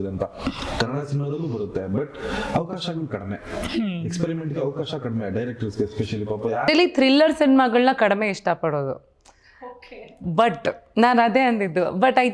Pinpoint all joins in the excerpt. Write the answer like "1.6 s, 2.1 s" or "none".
6.7 s